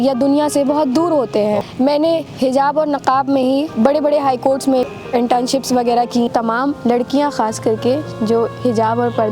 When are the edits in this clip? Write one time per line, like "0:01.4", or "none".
0:01.7
0:03.7
0:04.9
0:06.3